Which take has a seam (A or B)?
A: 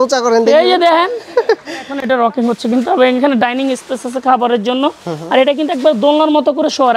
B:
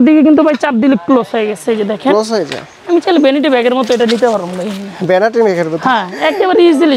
A